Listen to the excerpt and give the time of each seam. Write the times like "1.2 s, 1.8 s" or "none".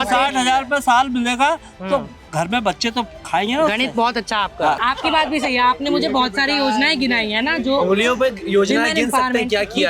4.8 s